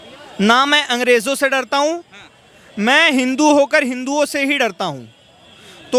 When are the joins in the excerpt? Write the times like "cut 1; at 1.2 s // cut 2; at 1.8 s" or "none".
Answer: none